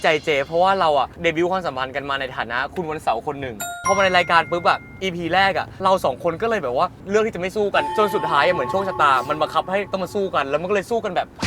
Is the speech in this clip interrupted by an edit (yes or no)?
yes